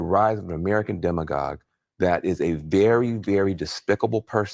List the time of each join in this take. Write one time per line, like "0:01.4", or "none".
none